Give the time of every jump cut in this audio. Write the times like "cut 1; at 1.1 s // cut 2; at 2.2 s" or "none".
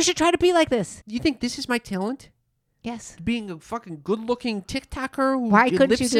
cut 1; at 1.0 s